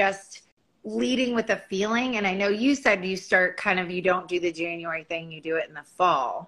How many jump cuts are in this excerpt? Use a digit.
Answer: 0